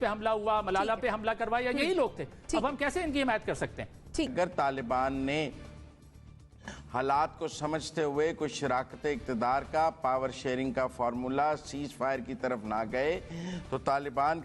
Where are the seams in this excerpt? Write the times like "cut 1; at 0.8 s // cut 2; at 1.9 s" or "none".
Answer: cut 1; at 4.3 s